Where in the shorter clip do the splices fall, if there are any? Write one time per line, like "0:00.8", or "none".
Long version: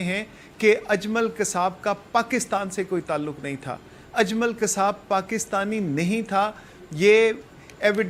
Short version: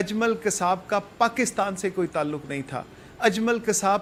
none